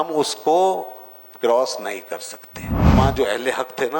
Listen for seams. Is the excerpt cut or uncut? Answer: cut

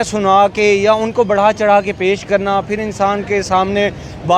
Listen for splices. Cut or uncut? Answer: uncut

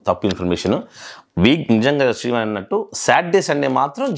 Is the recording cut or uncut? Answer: uncut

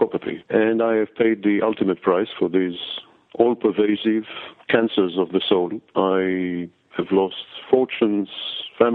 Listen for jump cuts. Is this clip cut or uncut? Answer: uncut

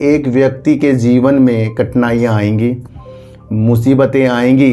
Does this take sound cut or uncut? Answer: uncut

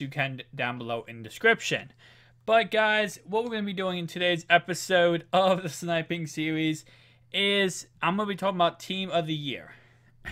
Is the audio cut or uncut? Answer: cut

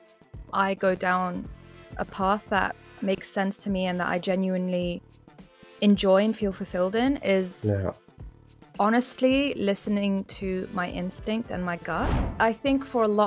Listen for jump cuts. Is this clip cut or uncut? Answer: cut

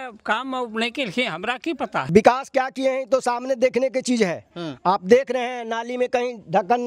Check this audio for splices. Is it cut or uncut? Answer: cut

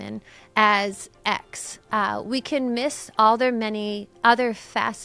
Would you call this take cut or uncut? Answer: uncut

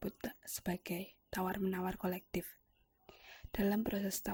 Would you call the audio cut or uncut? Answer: uncut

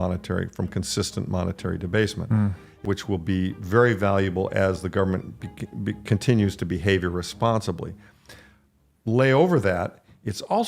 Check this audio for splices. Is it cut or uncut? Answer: cut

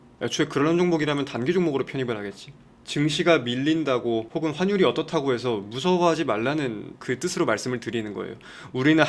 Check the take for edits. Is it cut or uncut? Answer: cut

